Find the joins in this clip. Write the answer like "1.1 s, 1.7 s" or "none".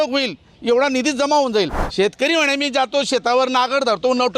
1.8 s